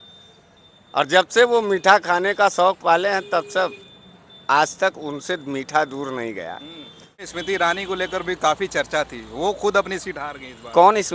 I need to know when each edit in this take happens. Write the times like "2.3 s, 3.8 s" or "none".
7.3 s